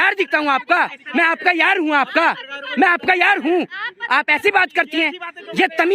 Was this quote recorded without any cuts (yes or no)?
yes